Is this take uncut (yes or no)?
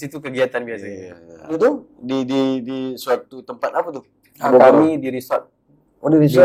no